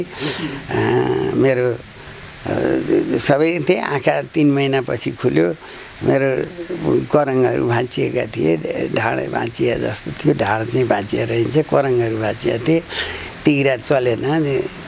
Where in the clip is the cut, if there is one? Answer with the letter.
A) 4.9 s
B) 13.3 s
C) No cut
C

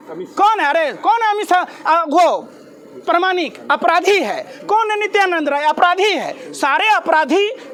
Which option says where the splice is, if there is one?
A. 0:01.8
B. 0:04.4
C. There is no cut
C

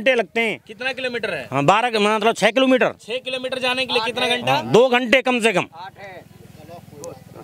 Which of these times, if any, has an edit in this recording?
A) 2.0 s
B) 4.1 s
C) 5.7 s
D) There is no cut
D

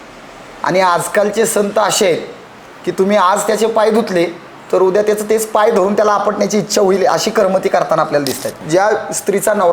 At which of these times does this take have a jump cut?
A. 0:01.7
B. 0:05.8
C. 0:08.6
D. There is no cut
C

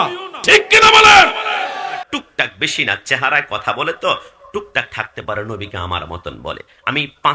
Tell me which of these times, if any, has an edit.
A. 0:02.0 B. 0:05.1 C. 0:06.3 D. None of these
A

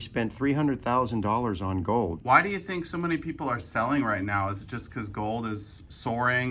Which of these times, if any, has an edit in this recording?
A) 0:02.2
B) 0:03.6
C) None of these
A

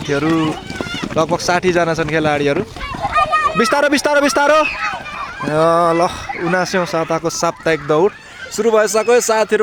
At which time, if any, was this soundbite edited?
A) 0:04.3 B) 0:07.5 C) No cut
C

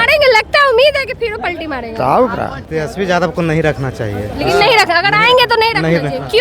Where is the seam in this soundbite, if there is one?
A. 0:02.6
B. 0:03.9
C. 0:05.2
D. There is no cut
A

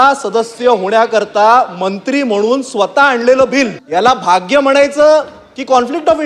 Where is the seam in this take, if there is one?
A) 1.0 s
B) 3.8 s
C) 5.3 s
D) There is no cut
B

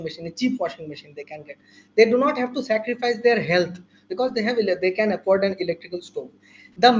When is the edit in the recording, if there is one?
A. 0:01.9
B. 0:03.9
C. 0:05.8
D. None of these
B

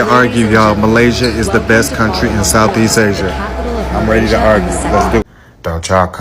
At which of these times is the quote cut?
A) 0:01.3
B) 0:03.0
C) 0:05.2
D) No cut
C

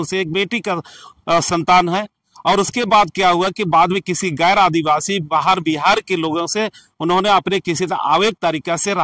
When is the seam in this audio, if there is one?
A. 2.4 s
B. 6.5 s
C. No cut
C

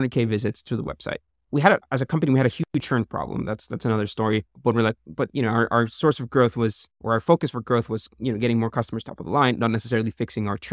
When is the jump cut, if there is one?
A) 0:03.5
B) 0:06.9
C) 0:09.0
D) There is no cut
D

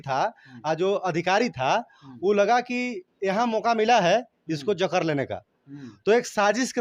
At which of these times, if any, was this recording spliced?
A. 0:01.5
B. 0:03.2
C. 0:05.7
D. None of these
D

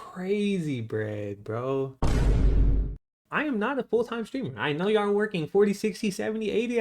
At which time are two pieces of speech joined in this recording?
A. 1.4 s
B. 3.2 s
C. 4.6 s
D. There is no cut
B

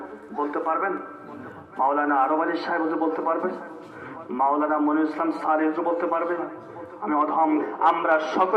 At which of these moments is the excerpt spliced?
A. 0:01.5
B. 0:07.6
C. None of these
B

